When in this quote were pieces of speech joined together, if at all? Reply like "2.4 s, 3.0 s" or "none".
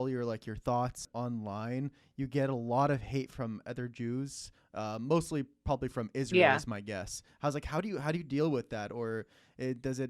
1.0 s